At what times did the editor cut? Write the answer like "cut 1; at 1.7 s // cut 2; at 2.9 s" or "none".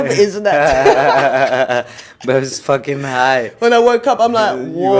none